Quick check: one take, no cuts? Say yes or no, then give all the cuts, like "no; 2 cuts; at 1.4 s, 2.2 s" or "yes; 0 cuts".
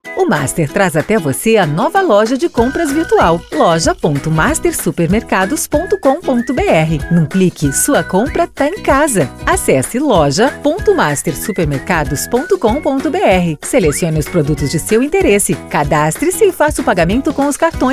yes; 0 cuts